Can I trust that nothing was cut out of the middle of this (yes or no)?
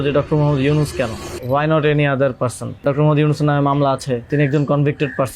no